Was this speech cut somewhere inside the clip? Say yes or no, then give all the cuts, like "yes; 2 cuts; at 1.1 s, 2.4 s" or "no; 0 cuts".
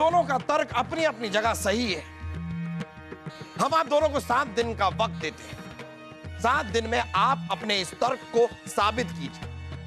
no; 0 cuts